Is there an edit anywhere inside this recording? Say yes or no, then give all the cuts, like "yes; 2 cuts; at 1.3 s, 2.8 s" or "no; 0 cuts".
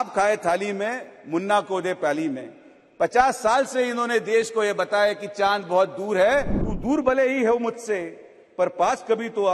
yes; 1 cut; at 6.6 s